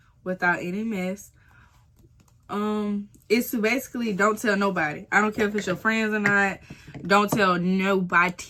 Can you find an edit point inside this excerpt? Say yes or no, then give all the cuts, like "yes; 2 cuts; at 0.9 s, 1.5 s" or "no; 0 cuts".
no; 0 cuts